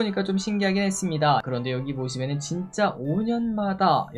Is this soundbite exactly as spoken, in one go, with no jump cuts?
no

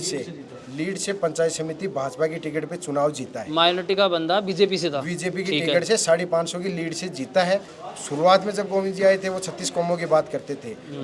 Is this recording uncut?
no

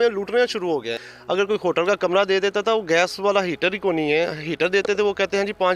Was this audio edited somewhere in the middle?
yes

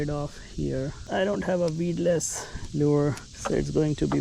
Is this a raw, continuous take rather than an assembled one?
no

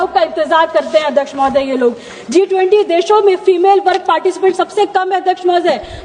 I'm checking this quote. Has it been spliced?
no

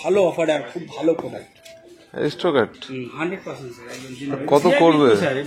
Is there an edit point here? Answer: no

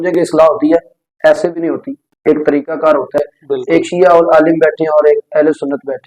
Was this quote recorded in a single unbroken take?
no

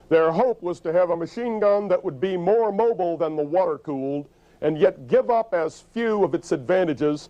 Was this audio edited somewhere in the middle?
yes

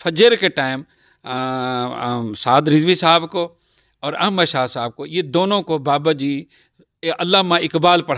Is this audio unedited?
yes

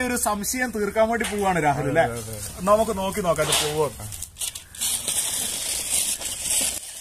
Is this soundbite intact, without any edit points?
yes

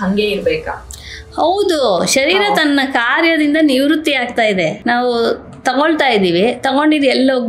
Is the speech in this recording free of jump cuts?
no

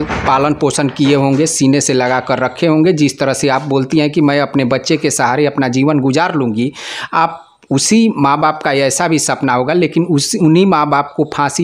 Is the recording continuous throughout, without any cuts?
yes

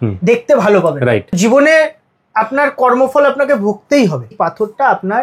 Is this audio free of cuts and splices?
no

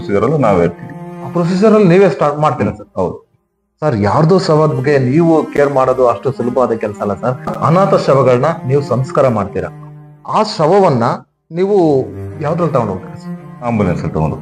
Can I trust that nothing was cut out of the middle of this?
yes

